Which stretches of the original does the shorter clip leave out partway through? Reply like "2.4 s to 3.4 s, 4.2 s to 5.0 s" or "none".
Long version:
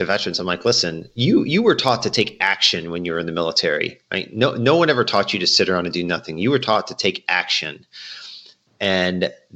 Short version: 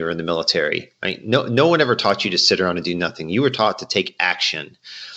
none